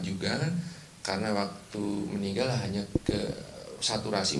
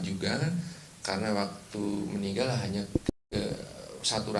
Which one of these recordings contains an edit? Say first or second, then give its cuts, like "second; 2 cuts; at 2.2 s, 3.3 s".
first; 1 cut; at 3.1 s